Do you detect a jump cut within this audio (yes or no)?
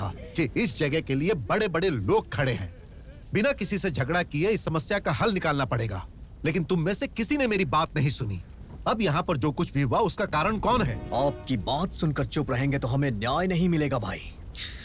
yes